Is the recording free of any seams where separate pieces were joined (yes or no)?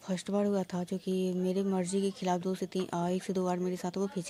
yes